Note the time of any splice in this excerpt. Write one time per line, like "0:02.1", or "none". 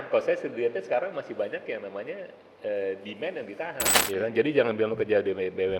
0:03.9